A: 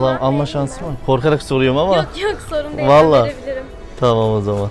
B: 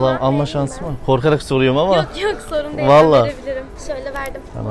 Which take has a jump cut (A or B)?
B